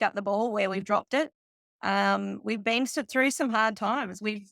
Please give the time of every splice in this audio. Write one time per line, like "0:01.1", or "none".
none